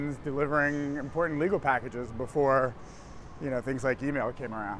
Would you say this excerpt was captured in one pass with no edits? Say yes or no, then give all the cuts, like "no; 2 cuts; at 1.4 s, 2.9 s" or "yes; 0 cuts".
yes; 0 cuts